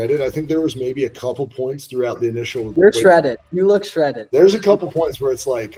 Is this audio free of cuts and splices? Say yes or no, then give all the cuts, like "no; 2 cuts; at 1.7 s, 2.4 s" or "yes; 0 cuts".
yes; 0 cuts